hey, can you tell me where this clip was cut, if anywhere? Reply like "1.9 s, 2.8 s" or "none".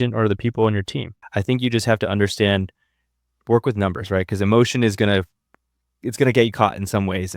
1.2 s